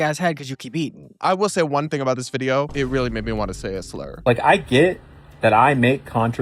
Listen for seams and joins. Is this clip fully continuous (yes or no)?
no